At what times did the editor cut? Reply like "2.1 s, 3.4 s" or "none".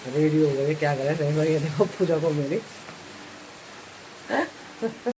none